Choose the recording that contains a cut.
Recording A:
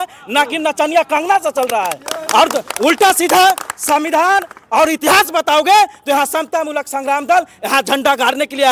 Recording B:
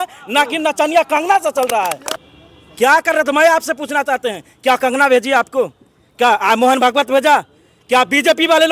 B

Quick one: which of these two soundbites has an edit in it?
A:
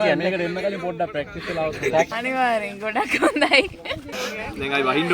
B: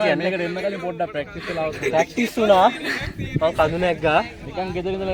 A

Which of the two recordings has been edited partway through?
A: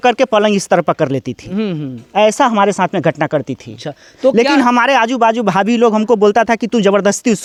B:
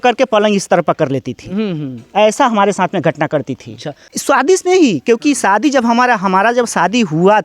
B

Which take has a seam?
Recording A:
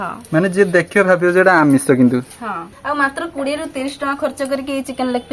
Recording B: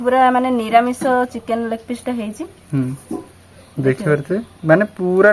A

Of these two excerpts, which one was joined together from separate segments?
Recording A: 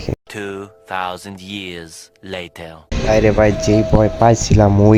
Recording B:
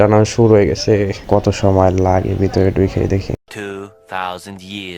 B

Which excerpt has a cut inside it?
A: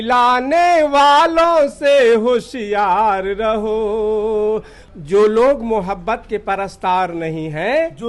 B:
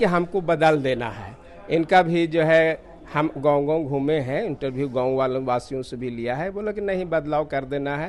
A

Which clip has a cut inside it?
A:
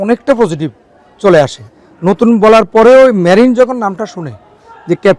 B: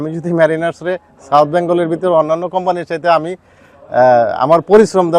A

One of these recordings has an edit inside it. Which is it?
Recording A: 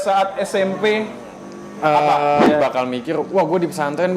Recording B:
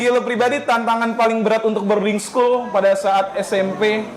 A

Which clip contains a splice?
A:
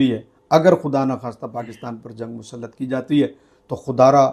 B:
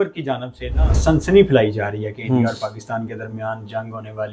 B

